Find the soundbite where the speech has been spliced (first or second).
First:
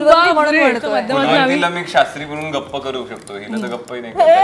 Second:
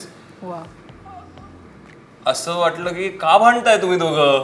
first